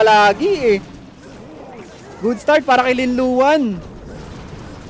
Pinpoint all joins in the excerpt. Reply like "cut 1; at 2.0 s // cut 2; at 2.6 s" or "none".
none